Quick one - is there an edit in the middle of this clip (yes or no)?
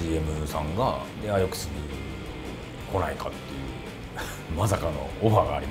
yes